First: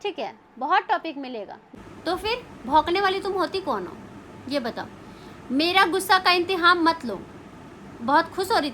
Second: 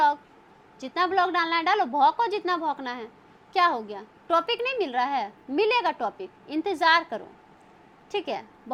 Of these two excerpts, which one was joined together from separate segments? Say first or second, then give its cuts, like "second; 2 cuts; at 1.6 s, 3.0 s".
first; 1 cut; at 1.7 s